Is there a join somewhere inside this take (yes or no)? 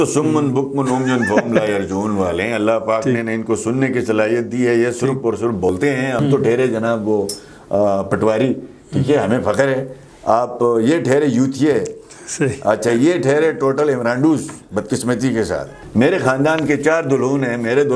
yes